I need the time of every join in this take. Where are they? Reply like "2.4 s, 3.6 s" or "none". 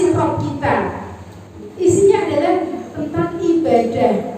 1.6 s